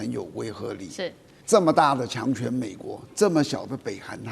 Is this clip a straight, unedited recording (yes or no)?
no